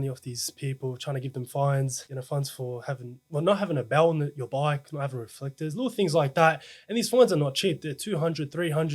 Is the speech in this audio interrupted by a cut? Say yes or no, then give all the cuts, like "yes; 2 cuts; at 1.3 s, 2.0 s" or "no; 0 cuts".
yes; 1 cut; at 2.1 s